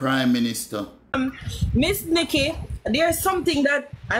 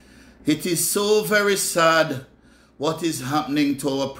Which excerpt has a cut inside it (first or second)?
first